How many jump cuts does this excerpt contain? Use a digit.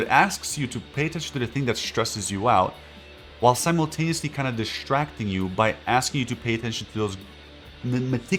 0